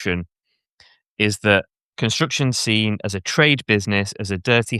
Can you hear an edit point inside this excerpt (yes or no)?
yes